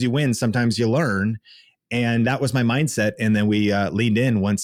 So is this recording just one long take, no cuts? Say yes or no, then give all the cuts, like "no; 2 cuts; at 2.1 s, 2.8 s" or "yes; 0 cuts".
yes; 0 cuts